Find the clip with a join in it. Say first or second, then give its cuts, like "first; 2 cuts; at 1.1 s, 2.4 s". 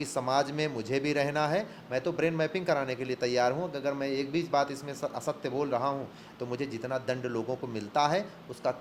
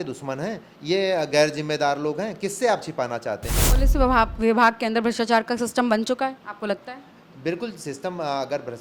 second; 1 cut; at 3.6 s